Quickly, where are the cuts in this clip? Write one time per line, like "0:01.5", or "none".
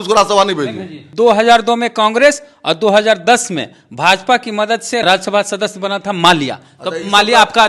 0:01.0
0:05.0